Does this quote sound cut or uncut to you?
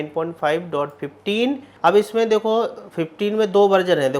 cut